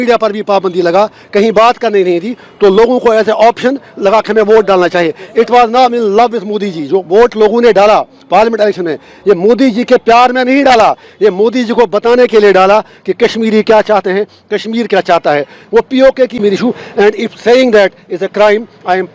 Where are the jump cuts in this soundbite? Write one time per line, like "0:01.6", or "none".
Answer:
0:16.3